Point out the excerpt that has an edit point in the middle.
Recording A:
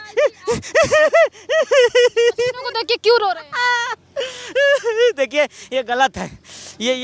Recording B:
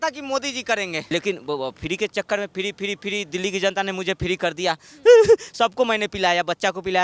B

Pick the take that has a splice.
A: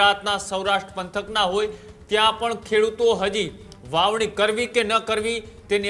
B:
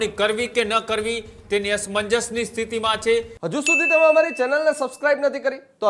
B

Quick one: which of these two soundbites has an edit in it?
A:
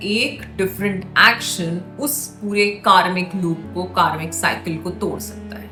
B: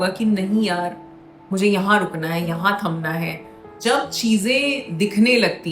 B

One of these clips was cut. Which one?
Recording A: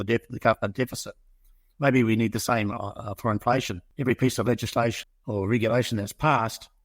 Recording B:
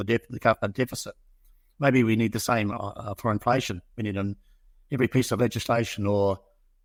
A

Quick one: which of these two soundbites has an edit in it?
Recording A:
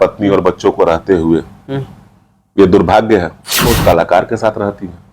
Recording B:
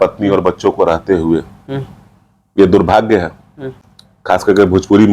A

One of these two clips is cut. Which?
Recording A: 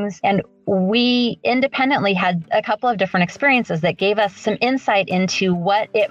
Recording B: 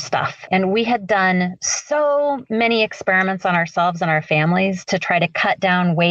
A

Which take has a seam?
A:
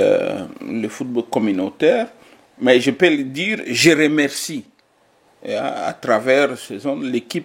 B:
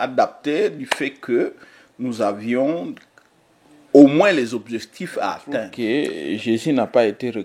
B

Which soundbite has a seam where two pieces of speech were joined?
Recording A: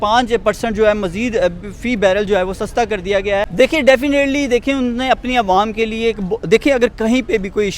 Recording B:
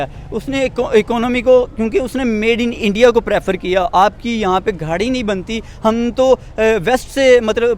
A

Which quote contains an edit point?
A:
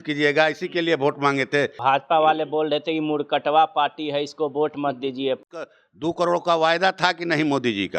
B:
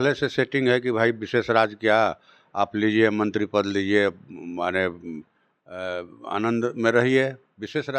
A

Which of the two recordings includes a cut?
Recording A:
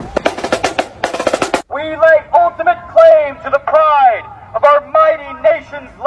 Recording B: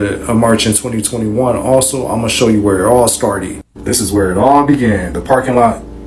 A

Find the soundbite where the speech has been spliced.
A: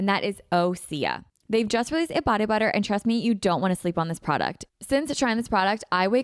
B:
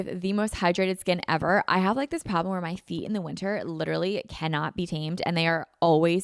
A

